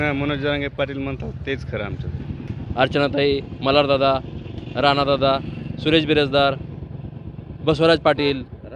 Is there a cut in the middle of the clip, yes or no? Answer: yes